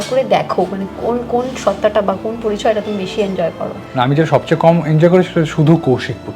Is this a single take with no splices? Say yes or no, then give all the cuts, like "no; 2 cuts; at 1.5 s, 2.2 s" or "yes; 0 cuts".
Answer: no; 1 cut; at 3.8 s